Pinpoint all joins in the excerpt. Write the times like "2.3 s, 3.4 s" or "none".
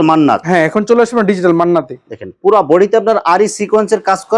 none

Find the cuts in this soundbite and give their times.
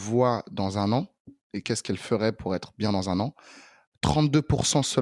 none

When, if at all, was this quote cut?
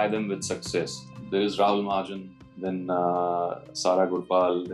1.0 s

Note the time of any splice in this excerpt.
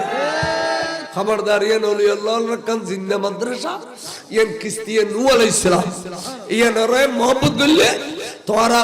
1.0 s

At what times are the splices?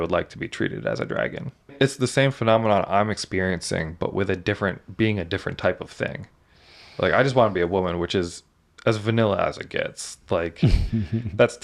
1.7 s

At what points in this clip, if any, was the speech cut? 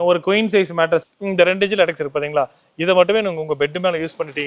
1.1 s

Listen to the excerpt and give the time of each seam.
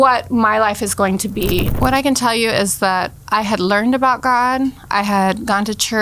1.7 s

